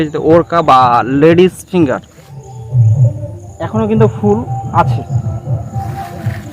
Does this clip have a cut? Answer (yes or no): no